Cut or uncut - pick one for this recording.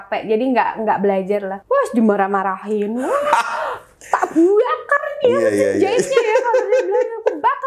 cut